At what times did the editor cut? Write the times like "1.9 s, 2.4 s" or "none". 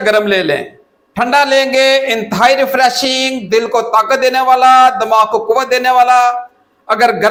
none